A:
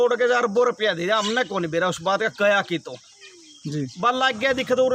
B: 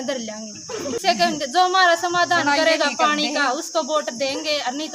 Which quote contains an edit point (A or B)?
B